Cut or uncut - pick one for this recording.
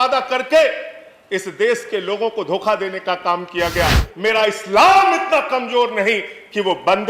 cut